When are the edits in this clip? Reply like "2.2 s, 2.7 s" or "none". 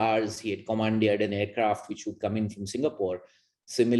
none